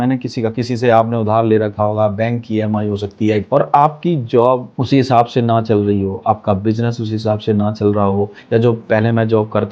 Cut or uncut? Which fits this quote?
cut